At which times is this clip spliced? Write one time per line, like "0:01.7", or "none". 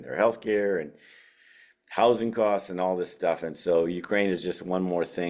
none

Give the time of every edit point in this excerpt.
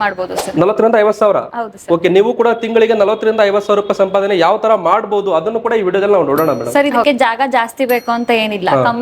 0:06.6

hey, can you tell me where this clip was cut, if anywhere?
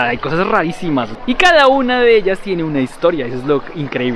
0:01.1

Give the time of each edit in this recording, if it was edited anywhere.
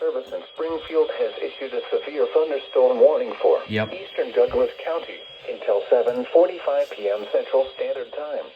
0:04.3
0:05.6
0:07.7

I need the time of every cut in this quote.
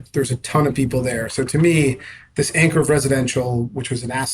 none

